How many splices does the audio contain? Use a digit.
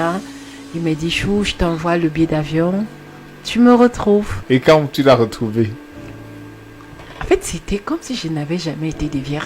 1